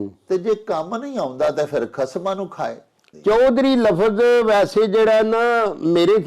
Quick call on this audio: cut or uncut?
cut